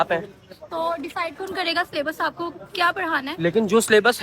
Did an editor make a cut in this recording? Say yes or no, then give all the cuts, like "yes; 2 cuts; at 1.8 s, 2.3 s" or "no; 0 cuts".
no; 0 cuts